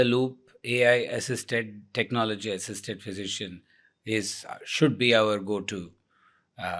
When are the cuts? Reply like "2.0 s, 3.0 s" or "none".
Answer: none